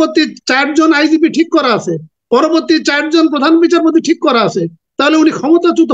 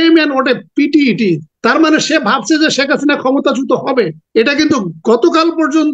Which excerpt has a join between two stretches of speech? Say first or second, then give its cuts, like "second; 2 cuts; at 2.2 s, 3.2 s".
second; 2 cuts; at 1.5 s, 4.2 s